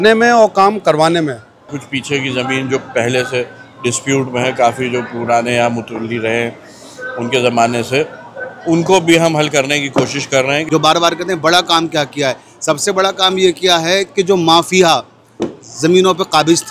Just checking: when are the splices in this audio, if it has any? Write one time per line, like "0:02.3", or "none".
0:01.7
0:10.6